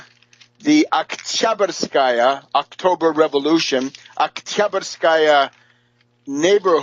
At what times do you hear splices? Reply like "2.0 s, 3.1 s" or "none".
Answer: 5.6 s